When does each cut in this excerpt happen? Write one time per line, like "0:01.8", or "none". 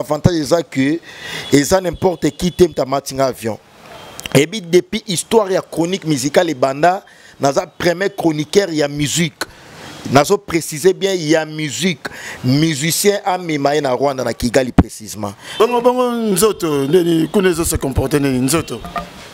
0:15.4